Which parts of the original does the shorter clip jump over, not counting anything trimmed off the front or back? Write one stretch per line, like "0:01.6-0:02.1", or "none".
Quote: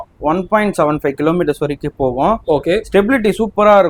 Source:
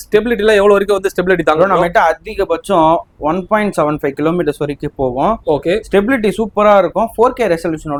none